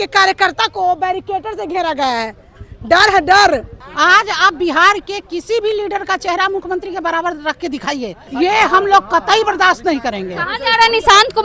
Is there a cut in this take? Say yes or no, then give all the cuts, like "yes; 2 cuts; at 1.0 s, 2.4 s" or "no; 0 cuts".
yes; 2 cuts; at 3.8 s, 8.2 s